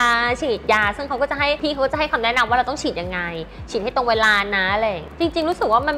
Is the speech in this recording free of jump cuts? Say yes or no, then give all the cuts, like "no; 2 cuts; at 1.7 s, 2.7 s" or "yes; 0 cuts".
no; 2 cuts; at 1.6 s, 5.1 s